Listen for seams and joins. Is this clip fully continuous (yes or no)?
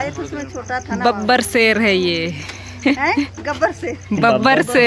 yes